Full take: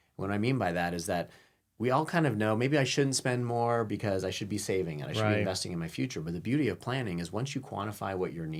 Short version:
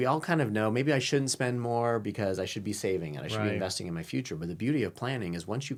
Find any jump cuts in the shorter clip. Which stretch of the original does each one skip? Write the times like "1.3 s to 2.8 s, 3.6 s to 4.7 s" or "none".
none